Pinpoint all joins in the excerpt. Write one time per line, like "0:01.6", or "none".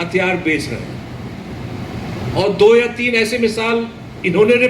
none